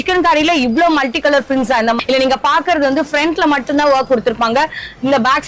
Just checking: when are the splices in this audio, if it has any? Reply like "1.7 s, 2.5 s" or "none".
2.0 s